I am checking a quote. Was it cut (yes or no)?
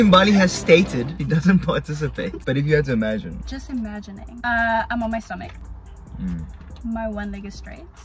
yes